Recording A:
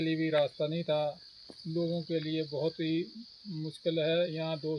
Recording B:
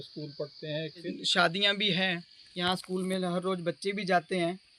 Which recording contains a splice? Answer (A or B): B